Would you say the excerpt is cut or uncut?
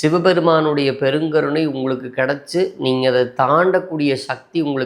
uncut